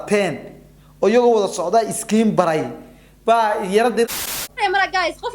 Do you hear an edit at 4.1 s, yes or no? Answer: yes